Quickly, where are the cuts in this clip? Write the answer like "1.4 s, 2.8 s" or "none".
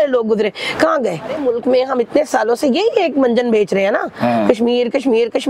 1.4 s